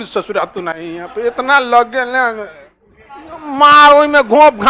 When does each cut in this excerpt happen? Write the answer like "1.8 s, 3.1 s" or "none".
none